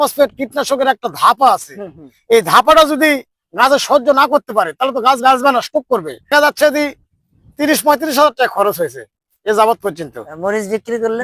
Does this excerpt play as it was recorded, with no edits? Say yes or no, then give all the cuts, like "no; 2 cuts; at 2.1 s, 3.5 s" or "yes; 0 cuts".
no; 1 cut; at 6.3 s